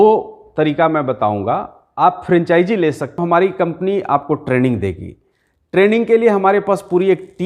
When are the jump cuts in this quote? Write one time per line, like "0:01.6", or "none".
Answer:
0:03.2